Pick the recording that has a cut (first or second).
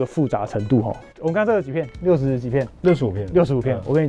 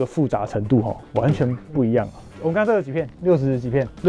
first